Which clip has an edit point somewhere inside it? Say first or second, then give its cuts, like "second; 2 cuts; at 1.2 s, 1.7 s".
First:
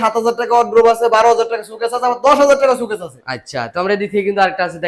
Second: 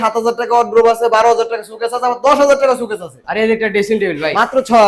second; 1 cut; at 3.2 s